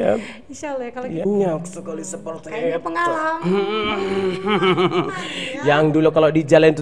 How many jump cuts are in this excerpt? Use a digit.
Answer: 1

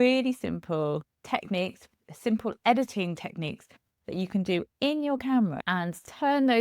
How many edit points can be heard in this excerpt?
2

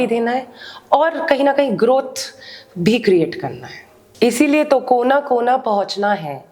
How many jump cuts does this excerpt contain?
1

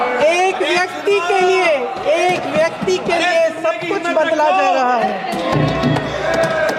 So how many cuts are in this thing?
0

